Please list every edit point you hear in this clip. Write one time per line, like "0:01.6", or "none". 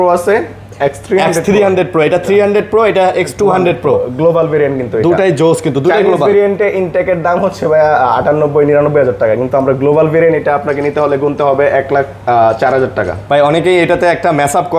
none